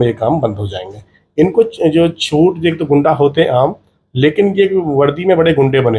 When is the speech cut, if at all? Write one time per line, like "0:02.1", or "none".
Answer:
none